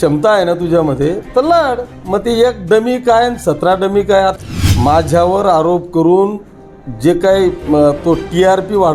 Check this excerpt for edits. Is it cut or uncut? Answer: cut